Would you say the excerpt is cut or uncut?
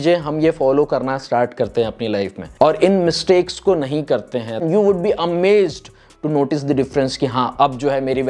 cut